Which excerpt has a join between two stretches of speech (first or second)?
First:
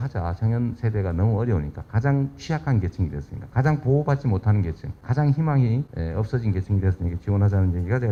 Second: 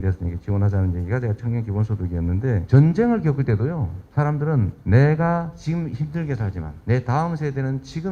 second